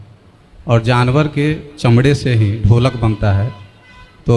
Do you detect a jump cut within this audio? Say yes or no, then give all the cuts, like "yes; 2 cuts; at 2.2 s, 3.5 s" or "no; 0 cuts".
no; 0 cuts